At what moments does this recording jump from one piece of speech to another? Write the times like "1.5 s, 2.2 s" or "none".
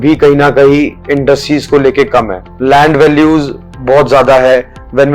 2.4 s